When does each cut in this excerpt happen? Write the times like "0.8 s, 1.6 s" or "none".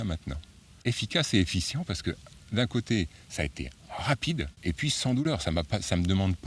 0.8 s, 4.5 s